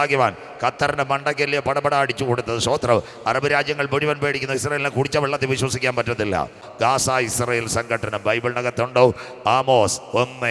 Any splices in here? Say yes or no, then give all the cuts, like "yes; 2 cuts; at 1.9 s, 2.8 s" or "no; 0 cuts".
yes; 1 cut; at 6.6 s